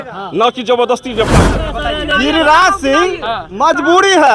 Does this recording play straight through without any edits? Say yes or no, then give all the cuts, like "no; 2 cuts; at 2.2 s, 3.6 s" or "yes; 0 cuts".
no; 1 cut; at 1.6 s